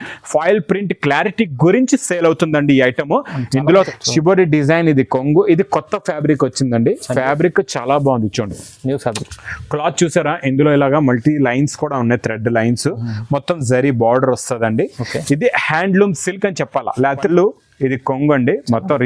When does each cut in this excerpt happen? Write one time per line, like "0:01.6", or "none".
0:03.9
0:17.3